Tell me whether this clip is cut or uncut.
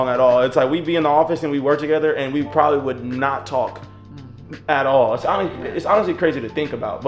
uncut